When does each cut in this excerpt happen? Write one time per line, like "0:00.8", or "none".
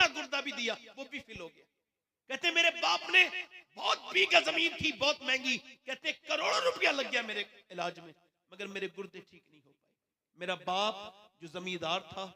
none